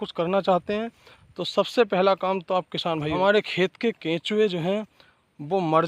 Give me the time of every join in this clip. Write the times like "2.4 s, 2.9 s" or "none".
3.1 s